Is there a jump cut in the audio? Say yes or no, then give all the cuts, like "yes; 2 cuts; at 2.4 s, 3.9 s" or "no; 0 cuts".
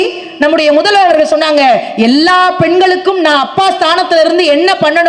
no; 0 cuts